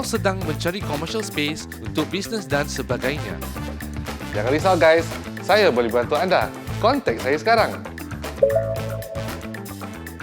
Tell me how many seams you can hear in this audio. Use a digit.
1